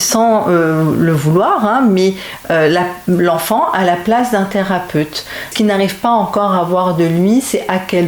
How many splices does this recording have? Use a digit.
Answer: 1